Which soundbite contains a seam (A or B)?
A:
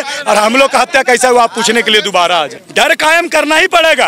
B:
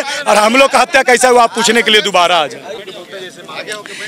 A